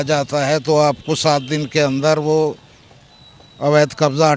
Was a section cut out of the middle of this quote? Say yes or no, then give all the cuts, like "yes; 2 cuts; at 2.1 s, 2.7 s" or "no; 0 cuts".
no; 0 cuts